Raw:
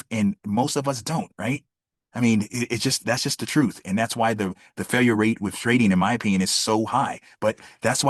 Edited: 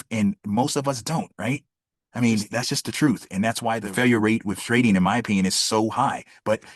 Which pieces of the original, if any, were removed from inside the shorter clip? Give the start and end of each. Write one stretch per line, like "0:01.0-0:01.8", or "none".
0:02.5-0:03.0
0:04.4-0:04.8

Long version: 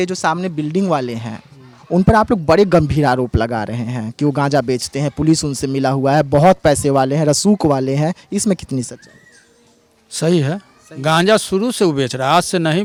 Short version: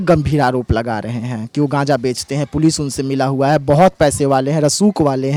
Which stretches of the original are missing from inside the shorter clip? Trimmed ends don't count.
none

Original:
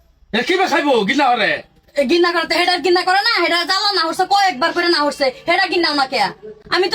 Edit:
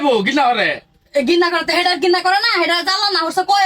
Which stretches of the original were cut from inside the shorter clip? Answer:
none

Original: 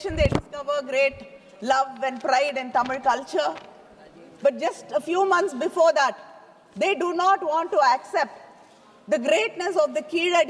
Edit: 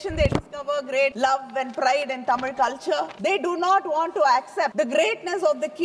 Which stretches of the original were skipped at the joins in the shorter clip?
0:01.1-0:01.6
0:03.6-0:06.7
0:08.3-0:09.0

